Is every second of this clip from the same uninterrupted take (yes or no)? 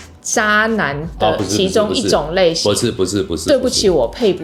yes